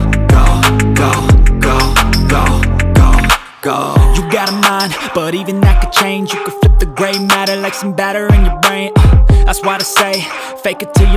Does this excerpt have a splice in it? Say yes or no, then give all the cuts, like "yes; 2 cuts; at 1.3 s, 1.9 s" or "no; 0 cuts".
no; 0 cuts